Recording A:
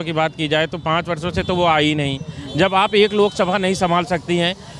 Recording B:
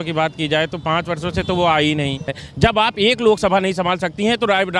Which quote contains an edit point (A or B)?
B